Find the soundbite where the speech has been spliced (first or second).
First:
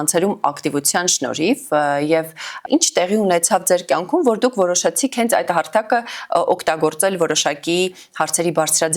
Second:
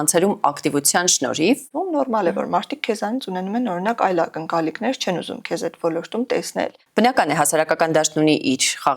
second